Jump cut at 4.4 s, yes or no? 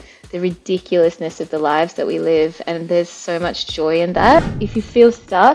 yes